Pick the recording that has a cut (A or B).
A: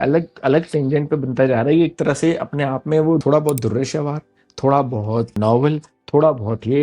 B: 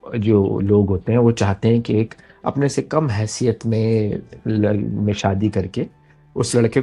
A